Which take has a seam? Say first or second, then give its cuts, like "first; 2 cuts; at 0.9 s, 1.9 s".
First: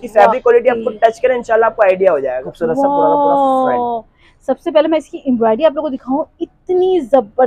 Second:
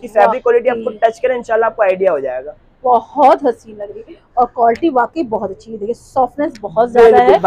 first; 1 cut; at 2.5 s